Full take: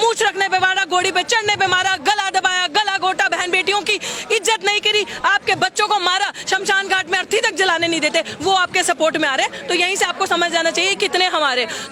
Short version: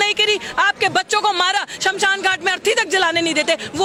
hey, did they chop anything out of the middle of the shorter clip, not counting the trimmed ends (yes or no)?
no